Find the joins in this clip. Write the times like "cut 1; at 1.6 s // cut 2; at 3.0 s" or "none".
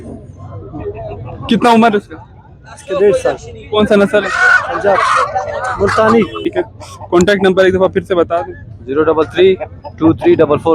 cut 1; at 6.5 s